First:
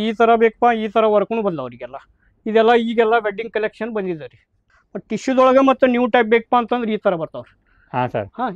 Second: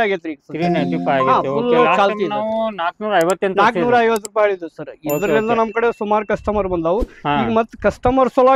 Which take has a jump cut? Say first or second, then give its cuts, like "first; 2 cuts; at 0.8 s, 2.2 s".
first; 1 cut; at 4.7 s